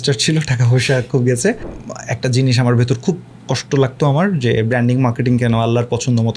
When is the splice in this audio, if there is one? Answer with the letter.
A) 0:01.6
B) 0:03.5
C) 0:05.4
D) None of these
A